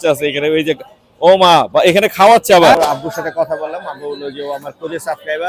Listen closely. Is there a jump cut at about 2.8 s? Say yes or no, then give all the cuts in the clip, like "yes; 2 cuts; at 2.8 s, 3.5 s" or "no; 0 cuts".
yes; 1 cut; at 2.8 s